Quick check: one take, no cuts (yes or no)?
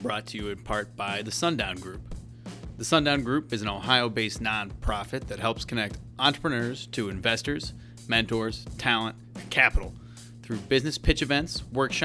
yes